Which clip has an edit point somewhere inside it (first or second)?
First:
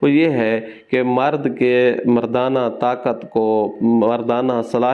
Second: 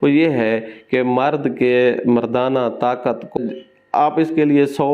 second